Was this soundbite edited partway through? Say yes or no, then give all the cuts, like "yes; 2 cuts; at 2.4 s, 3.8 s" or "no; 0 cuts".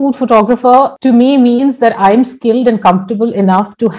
yes; 1 cut; at 1.0 s